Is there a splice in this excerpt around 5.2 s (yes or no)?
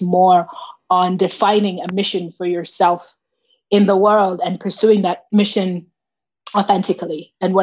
yes